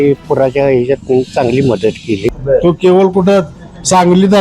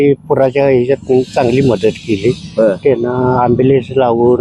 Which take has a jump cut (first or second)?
first